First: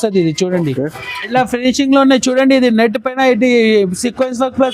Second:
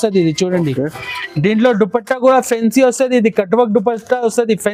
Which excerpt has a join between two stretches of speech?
first; 1 cut; at 1.3 s

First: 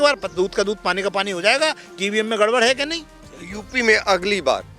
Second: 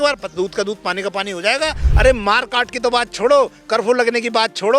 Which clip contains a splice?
second; 1 cut; at 1.8 s

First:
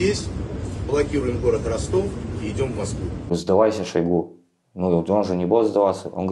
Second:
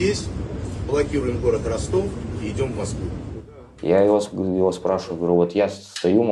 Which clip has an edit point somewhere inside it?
first; 1 cut; at 3.3 s

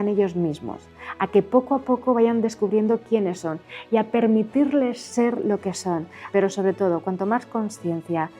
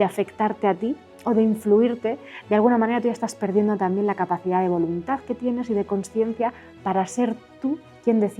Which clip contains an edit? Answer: first; 1 cut; at 6.2 s

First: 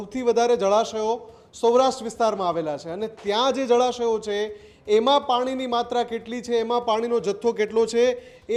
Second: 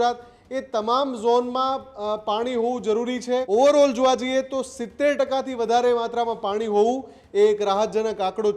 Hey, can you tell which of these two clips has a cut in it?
second; 1 cut; at 3.5 s

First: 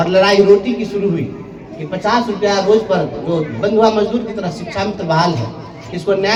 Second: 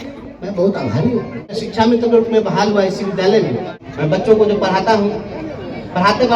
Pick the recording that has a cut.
second; 2 cuts; at 1.6 s, 4.2 s

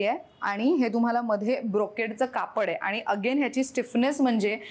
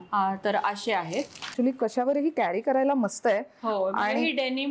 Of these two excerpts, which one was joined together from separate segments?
second; 1 cut; at 1.5 s

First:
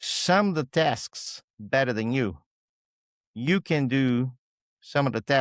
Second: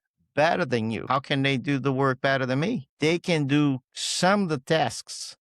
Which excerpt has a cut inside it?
second; 2 cuts; at 1.0 s, 2.9 s

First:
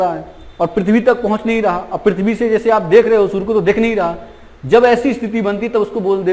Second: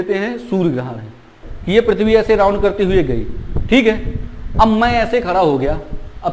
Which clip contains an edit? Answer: second; 1 cut; at 1.4 s

